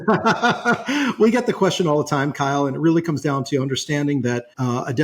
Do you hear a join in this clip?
no; 0 cuts

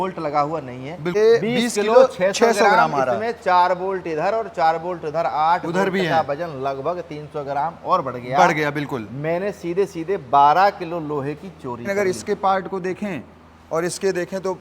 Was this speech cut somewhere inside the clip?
yes; 2 cuts; at 1.2 s, 11.8 s

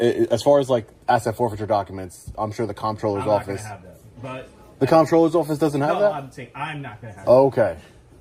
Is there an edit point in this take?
no; 0 cuts

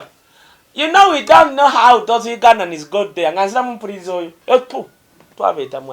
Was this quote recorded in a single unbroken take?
no; 1 cut; at 4.3 s

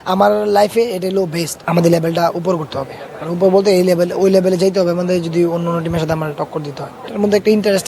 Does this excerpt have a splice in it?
yes; 2 cuts; at 1.6 s, 7.0 s

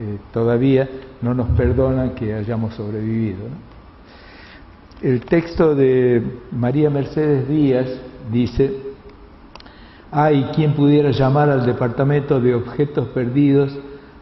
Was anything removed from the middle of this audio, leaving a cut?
no; 0 cuts

